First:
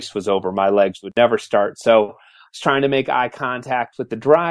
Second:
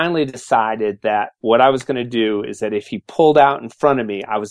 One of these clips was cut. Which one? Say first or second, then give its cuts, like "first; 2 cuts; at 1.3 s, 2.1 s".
first; 1 cut; at 1.0 s